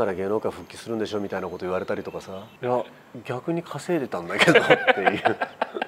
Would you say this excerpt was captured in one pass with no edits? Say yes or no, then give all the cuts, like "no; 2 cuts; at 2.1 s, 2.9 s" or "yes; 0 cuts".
no; 1 cut; at 2.4 s